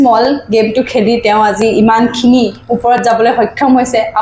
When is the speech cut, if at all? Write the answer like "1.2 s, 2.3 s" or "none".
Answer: none